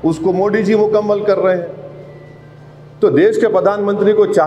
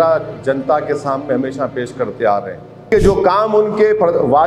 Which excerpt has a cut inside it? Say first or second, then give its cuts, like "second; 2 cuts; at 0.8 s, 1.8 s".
second; 1 cut; at 2.8 s